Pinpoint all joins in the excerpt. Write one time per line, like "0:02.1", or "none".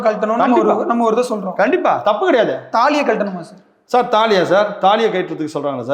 none